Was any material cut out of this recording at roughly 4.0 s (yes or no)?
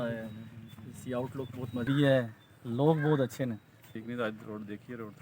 yes